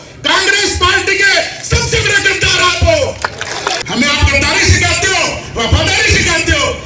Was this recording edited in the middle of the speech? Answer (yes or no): yes